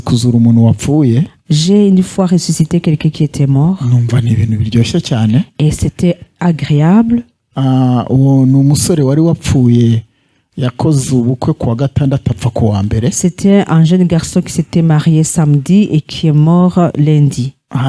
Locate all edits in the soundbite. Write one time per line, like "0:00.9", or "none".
none